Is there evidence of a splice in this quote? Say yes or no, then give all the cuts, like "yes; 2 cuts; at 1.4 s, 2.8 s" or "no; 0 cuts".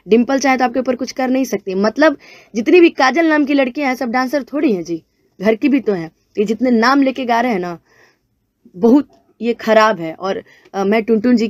no; 0 cuts